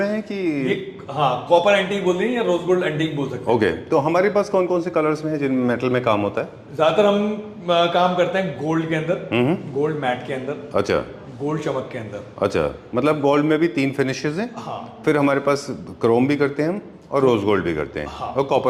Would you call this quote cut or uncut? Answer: uncut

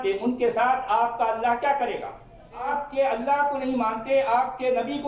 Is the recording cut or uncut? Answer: cut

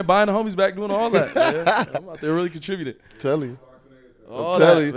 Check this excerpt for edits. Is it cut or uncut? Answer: uncut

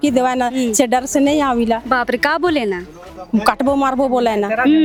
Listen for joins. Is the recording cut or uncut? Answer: uncut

